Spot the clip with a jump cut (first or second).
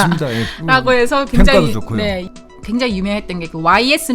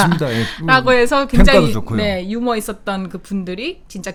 first